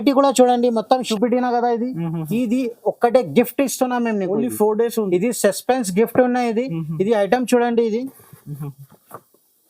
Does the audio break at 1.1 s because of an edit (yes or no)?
yes